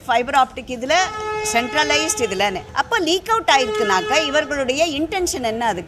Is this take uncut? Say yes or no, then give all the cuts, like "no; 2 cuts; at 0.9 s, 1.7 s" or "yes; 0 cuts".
no; 1 cut; at 2.6 s